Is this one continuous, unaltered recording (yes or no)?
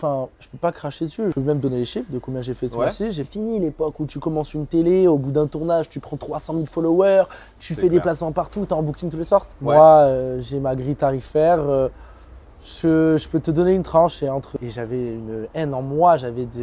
no